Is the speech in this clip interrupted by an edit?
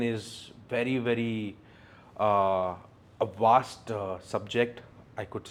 no; 0 cuts

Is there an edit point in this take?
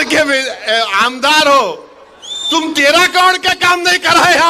no; 0 cuts

